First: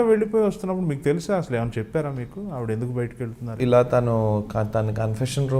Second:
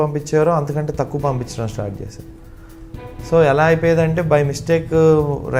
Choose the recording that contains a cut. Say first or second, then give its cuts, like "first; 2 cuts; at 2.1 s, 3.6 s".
first; 1 cut; at 3.5 s